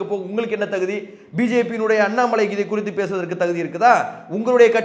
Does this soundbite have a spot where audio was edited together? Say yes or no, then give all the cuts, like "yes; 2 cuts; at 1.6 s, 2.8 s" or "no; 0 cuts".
no; 0 cuts